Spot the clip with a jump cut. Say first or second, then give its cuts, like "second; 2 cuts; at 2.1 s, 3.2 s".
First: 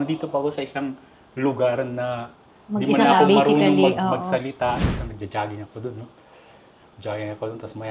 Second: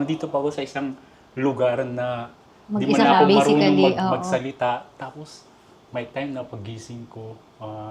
first; 1 cut; at 4.9 s